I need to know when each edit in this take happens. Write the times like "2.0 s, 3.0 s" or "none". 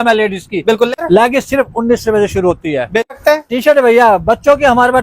1.0 s, 3.1 s